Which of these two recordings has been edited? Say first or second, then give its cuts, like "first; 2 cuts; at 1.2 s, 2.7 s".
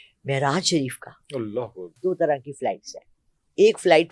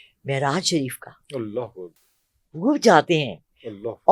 first; 1 cut; at 1.9 s